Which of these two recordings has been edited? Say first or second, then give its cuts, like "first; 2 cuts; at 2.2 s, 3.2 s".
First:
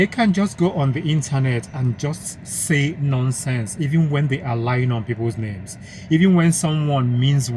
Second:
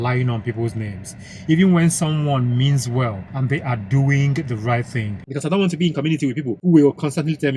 second; 1 cut; at 5.2 s